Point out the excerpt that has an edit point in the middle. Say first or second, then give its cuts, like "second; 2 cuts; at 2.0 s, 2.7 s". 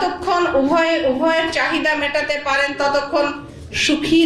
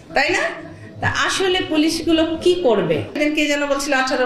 second; 1 cut; at 3.1 s